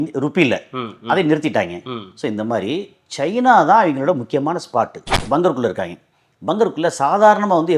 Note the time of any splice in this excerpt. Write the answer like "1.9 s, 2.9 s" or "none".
5.2 s